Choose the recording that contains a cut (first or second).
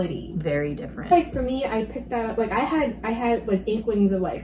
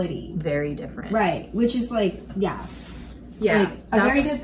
first